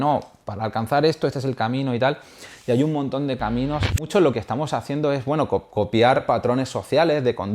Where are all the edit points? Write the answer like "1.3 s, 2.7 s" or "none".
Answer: 4.1 s, 6.2 s